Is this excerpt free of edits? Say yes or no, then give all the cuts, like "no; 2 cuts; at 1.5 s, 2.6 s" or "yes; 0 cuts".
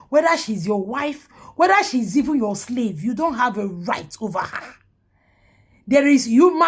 yes; 0 cuts